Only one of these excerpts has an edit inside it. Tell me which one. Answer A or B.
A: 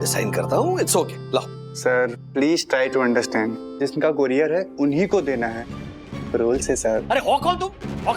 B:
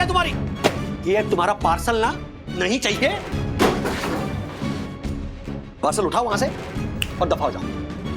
A